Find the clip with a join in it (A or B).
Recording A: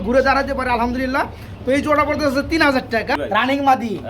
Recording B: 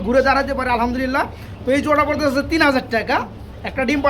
A